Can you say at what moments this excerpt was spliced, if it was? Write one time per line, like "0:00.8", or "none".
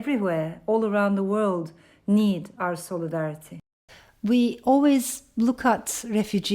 0:03.8